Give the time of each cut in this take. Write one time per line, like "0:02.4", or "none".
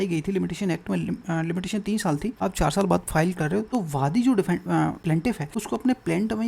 0:02.4
0:03.7
0:05.3